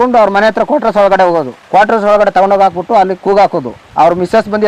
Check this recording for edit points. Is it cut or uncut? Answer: uncut